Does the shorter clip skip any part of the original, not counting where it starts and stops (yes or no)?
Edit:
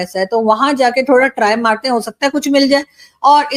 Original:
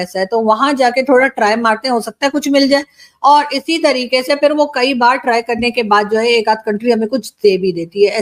no